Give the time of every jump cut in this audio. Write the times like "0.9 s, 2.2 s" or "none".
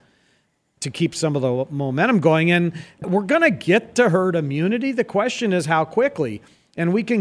3.0 s